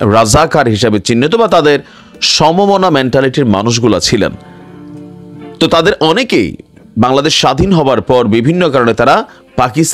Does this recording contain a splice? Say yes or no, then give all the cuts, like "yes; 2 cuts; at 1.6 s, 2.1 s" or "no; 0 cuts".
no; 0 cuts